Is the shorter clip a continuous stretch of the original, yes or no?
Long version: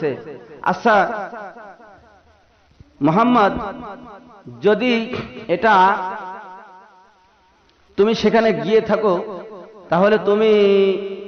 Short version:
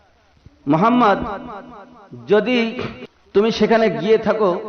no